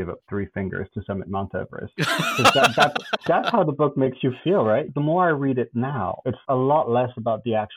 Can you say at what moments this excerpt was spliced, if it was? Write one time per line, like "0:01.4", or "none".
0:01.8
0:04.9
0:06.3